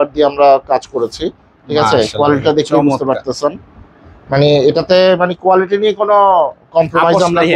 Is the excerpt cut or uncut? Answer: uncut